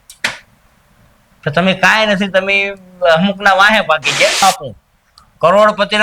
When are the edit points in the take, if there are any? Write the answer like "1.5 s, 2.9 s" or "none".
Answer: 4.4 s